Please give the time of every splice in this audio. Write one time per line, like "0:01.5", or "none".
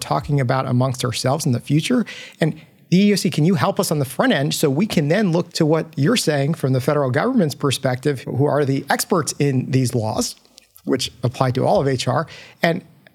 0:05.5
0:08.2